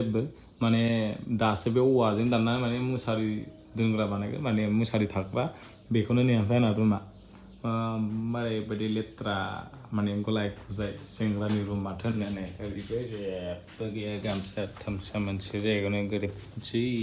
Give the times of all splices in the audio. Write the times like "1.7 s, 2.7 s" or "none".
none